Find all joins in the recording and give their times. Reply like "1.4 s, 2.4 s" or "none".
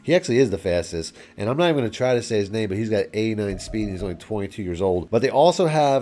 none